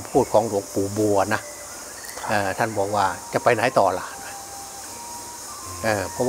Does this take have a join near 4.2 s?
no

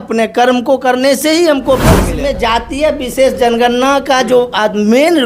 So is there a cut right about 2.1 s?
yes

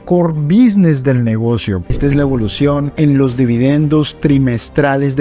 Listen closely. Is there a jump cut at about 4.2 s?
no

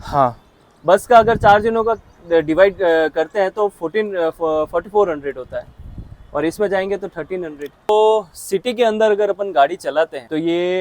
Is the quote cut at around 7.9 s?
yes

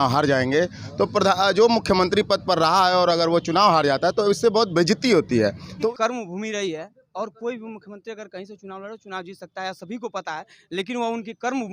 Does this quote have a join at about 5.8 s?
yes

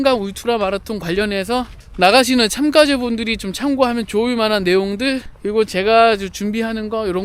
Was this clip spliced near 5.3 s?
yes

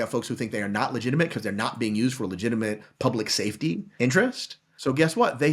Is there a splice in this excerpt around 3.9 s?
yes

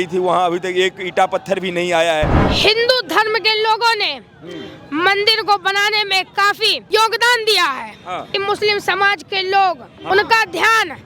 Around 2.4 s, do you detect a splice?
yes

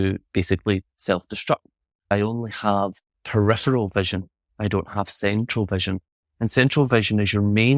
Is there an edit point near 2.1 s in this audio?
yes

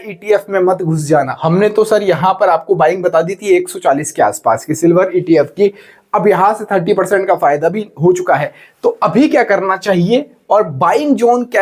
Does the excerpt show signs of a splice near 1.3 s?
yes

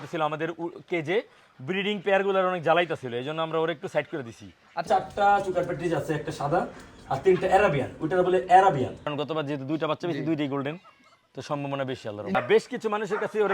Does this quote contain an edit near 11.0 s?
no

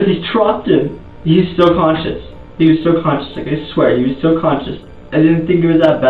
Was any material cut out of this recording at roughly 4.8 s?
yes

